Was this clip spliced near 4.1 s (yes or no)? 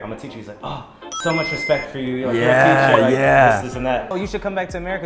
yes